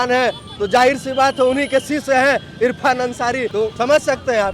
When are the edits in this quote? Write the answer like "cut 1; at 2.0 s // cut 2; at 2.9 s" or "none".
cut 1; at 3.6 s